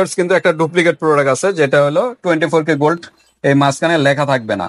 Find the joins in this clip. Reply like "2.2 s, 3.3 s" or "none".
none